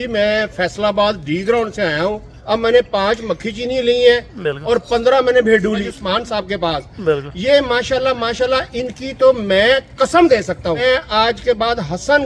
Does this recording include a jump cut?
yes; 3 cuts; at 2.3 s, 5.8 s, 10.8 s

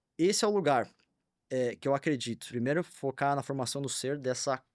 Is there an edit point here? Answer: yes; 1 cut; at 2.4 s

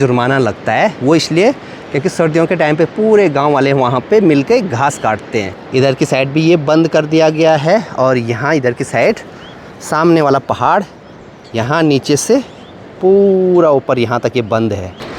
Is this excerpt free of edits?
yes; 0 cuts

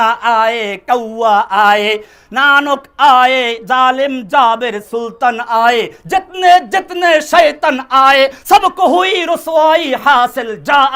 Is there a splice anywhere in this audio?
no; 0 cuts

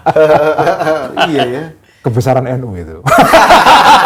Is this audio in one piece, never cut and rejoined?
yes; 0 cuts

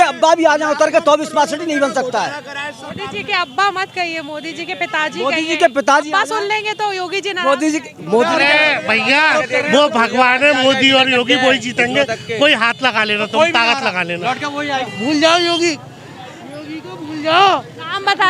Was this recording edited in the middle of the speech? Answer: yes; 2 cuts; at 8.3 s, 14.9 s

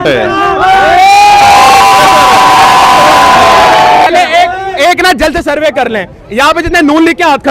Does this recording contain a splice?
yes; 1 cut; at 4.1 s

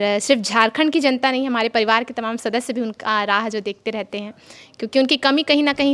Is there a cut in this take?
no; 0 cuts

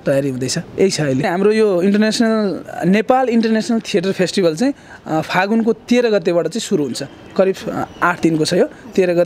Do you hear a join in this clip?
yes; 1 cut; at 1.2 s

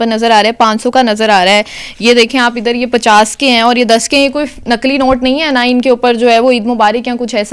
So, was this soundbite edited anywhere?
no; 0 cuts

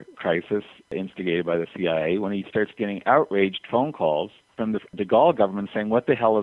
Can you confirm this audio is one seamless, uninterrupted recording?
no; 2 cuts; at 0.9 s, 4.5 s

